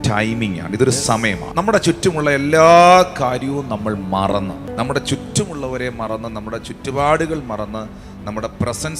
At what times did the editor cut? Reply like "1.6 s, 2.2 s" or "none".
1.4 s, 4.7 s

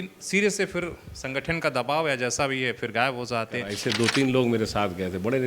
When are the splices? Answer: 3.7 s

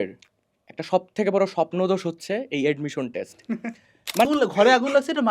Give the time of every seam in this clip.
4.3 s

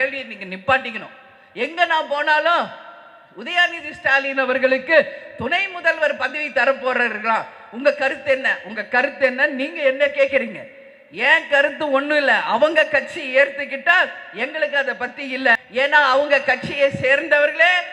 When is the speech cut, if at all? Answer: 15.6 s

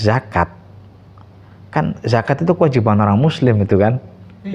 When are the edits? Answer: none

